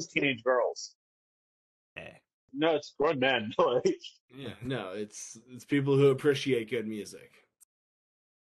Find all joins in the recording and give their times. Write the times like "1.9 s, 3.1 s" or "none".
2.5 s